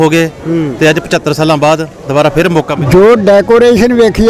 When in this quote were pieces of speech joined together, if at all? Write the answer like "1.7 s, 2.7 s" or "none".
2.7 s